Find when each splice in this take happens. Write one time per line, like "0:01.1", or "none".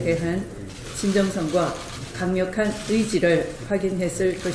none